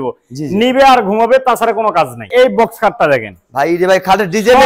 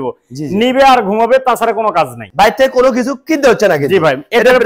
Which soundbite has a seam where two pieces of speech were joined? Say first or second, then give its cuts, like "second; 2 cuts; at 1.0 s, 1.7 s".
first; 1 cut; at 2.3 s